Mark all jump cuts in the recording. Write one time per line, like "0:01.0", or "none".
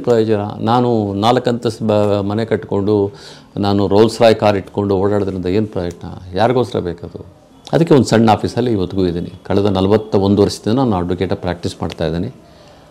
none

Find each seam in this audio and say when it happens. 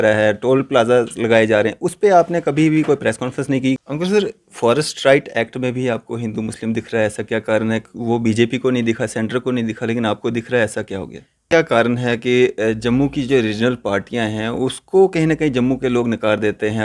0:03.8
0:11.4

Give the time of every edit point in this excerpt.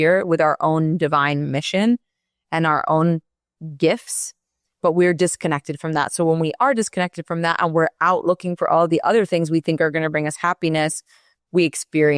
none

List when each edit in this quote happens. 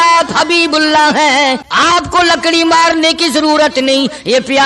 0:01.7

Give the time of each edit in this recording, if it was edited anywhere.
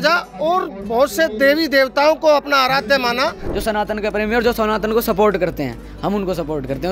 0:03.5

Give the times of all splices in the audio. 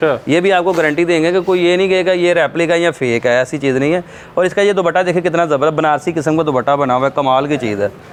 none

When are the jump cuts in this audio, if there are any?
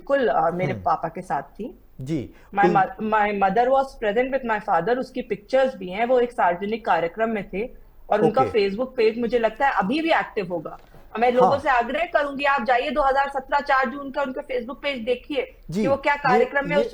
none

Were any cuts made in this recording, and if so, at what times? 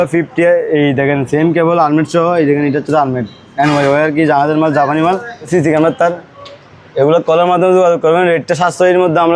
0:05.5

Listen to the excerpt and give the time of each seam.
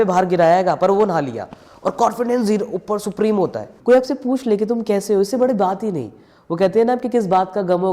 0:03.7

